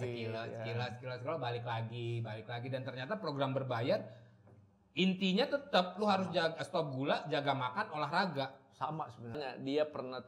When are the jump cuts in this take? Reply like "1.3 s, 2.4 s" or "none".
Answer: 9.4 s